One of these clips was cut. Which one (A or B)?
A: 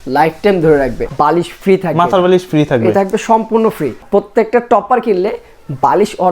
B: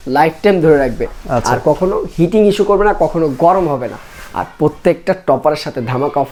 A